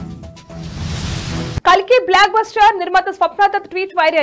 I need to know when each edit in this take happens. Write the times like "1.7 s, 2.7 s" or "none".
none